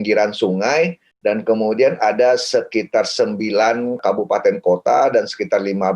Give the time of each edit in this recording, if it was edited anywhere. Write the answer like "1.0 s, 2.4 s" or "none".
1.1 s, 4.0 s